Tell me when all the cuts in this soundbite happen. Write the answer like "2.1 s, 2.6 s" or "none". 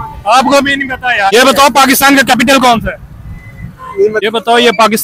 1.3 s, 4.2 s